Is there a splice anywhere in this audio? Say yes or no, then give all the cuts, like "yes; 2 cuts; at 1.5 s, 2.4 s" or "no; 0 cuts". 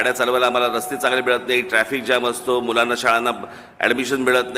no; 0 cuts